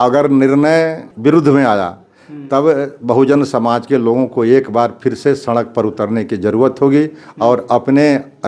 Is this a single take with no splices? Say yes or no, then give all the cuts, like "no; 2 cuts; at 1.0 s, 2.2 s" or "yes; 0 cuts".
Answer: no; 1 cut; at 1.0 s